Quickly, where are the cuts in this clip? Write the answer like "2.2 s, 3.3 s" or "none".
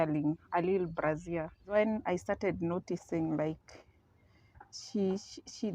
1.7 s